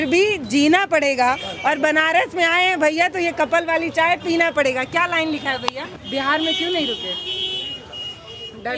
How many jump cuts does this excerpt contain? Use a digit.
1